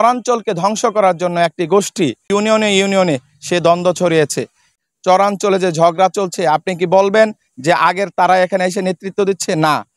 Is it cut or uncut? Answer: cut